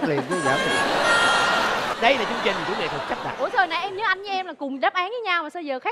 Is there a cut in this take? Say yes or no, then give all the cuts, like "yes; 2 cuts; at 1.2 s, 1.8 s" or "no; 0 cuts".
yes; 1 cut; at 1.9 s